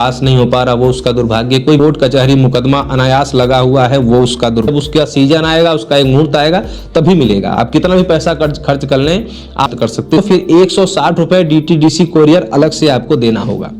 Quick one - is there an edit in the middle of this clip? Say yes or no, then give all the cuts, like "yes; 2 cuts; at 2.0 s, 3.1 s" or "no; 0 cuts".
yes; 3 cuts; at 1.8 s, 4.7 s, 10.0 s